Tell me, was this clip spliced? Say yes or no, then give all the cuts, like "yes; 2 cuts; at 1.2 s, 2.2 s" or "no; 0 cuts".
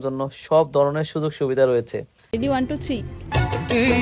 yes; 1 cut; at 2.3 s